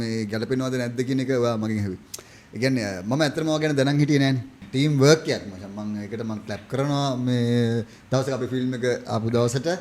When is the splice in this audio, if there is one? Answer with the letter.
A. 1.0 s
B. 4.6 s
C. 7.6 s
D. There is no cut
B